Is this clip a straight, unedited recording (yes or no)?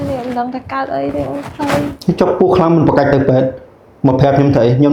yes